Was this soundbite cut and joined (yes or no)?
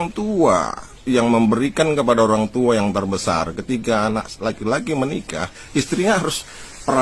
no